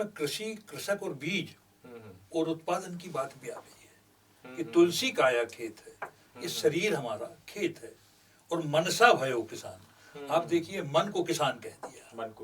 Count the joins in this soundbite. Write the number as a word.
zero